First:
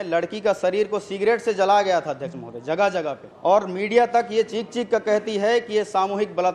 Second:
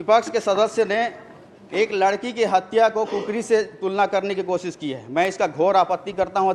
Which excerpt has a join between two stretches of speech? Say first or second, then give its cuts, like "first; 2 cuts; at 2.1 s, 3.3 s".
first; 1 cut; at 3.3 s